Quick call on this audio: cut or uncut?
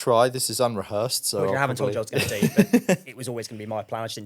uncut